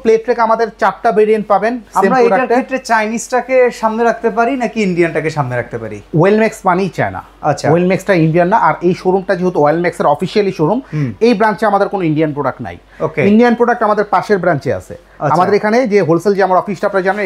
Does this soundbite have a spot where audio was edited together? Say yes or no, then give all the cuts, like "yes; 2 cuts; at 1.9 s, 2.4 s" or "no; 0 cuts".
no; 0 cuts